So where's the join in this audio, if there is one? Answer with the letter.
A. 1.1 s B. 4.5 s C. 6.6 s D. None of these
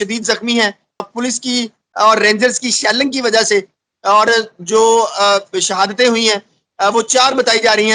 A